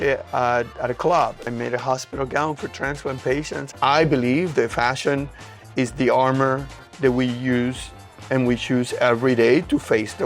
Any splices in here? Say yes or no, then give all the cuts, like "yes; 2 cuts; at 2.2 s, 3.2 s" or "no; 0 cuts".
yes; 2 cuts; at 1.5 s, 3.6 s